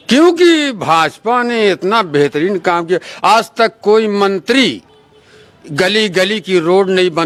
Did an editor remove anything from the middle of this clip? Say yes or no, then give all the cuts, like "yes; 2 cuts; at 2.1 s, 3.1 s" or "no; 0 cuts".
no; 0 cuts